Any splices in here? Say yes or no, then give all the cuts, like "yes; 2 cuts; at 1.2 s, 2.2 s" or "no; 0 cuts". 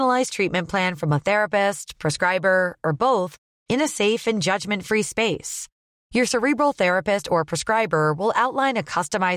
no; 0 cuts